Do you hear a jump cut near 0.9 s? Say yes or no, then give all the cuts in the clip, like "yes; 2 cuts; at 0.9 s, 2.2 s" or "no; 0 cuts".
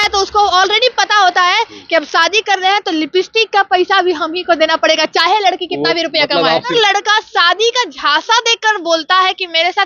no; 1 cut; at 6.7 s